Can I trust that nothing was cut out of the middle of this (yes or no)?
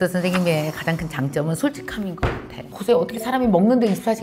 no